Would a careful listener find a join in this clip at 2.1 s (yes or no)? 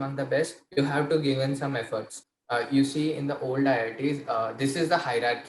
yes